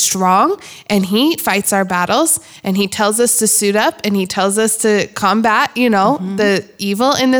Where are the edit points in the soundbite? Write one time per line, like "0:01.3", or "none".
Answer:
0:01.4

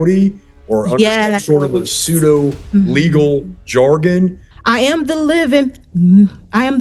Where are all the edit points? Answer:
0:04.5

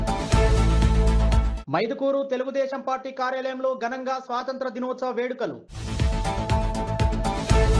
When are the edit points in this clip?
0:01.5

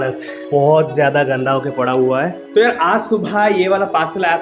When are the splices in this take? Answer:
0:02.4

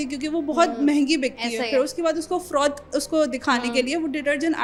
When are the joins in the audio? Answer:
none

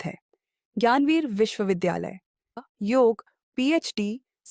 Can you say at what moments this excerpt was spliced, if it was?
0:02.6

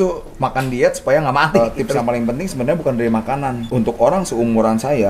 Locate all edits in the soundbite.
0:01.6
0:03.6

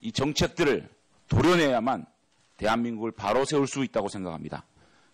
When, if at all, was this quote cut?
0:04.2

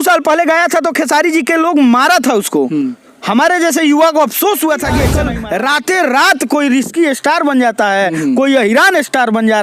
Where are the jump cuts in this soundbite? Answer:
0:05.2

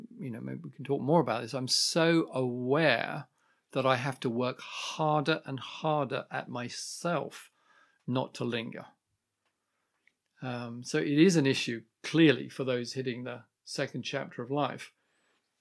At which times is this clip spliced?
none

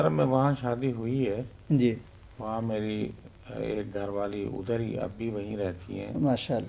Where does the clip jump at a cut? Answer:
none

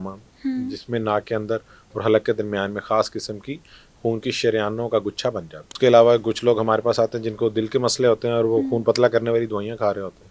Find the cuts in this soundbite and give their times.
0:05.6

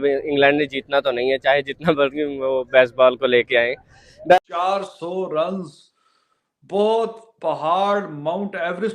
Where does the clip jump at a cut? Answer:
0:04.4

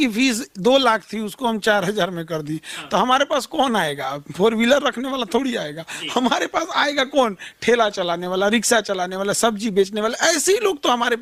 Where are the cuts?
none

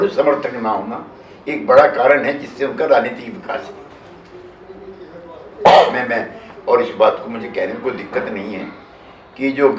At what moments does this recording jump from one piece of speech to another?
none

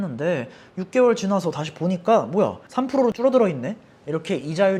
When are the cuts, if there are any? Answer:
none

